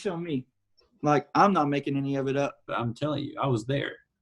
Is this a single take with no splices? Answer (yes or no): no